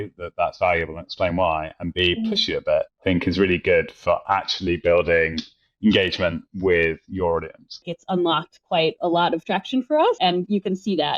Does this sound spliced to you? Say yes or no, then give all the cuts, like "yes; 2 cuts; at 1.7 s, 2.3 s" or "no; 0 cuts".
yes; 3 cuts; at 2.9 s, 7.9 s, 10.2 s